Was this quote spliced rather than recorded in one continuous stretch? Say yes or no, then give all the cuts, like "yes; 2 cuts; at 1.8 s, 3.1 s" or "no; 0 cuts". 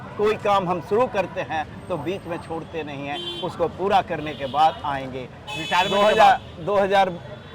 no; 0 cuts